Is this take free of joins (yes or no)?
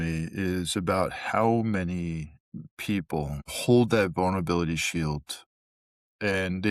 yes